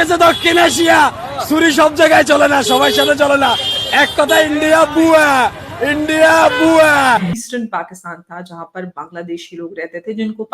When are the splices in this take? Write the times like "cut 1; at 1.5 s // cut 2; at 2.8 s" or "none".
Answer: cut 1; at 7.3 s